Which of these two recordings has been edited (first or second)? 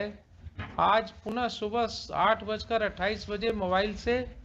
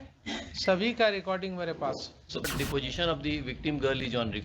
second